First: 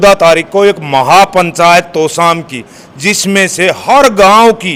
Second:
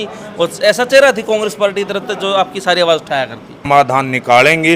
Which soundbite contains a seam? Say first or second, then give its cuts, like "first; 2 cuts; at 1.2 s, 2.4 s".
second; 1 cut; at 3.6 s